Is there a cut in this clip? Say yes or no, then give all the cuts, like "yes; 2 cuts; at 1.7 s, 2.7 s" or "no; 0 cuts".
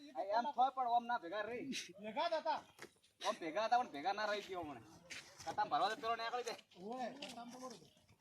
no; 0 cuts